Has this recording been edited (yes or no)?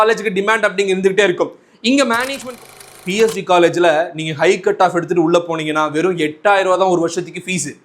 yes